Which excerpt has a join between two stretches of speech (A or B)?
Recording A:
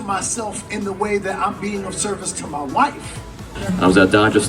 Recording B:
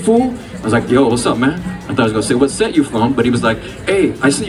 A